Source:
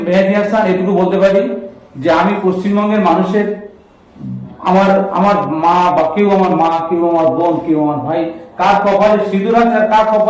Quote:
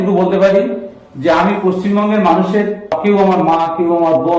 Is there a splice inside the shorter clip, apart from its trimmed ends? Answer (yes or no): yes